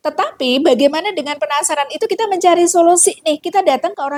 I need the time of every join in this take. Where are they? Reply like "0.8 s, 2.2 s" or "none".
none